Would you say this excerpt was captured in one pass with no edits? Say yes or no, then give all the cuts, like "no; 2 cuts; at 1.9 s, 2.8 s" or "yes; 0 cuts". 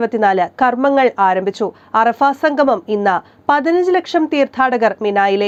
yes; 0 cuts